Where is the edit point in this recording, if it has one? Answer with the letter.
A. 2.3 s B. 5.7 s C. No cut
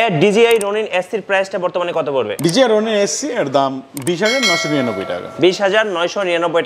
A